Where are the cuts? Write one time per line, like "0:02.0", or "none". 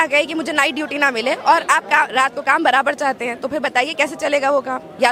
none